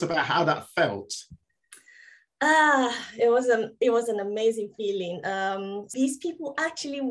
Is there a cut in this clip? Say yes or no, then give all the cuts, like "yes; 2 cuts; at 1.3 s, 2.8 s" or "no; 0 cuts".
yes; 1 cut; at 5.8 s